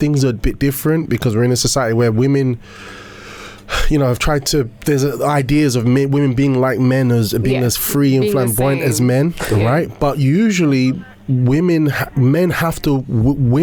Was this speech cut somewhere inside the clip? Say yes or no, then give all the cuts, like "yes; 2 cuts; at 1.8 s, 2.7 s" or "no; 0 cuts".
no; 0 cuts